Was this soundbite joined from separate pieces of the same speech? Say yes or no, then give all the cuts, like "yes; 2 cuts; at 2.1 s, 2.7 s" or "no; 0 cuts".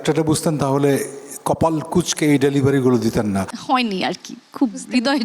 yes; 1 cut; at 3.5 s